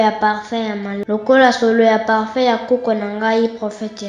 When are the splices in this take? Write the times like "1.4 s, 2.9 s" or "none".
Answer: 1.0 s